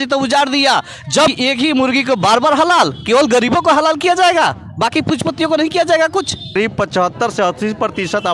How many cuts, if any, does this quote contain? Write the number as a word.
two